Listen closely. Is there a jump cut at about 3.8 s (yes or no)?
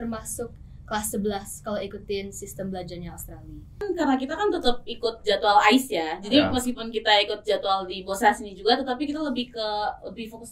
yes